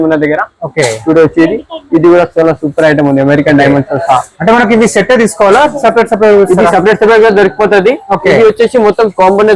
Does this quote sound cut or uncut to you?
uncut